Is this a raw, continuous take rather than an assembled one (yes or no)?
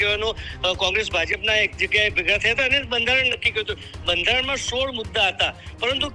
yes